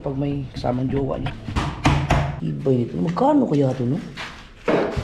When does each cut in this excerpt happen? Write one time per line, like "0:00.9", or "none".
0:01.6
0:02.3